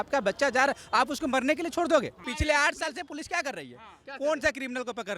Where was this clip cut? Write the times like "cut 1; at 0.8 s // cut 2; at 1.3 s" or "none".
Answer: cut 1; at 2.3 s